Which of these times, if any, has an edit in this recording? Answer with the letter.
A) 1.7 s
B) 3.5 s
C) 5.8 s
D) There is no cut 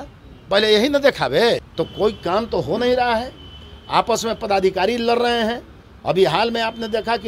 A